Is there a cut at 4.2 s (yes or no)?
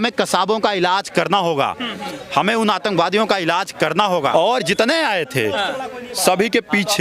yes